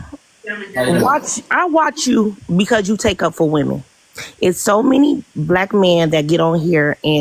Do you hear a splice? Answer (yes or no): no